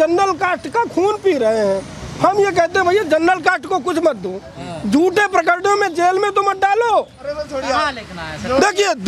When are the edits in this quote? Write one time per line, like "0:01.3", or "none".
none